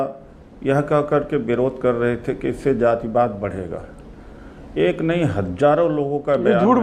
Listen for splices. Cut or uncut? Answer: uncut